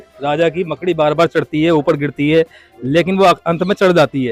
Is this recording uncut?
yes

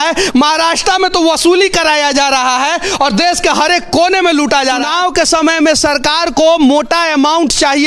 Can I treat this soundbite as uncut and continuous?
no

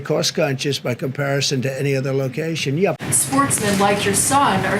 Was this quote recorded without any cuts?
no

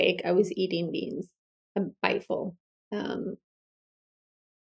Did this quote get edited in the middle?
no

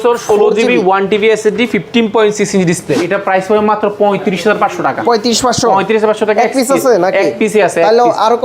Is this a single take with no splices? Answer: no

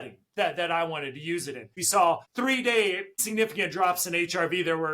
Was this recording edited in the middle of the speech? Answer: yes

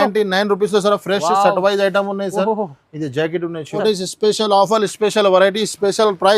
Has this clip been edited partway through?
yes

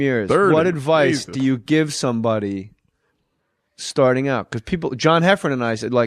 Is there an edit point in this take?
no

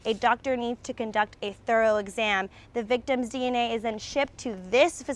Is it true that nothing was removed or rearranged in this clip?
yes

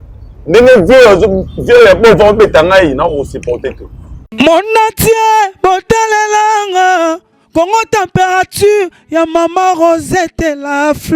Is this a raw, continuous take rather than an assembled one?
no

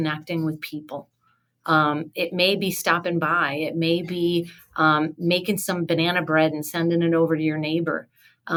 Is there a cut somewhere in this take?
no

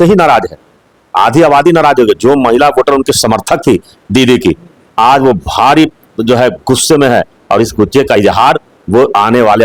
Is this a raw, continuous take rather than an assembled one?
yes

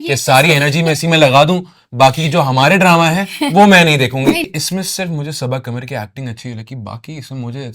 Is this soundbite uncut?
no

